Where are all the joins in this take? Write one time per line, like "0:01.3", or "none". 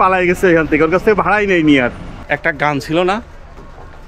0:02.1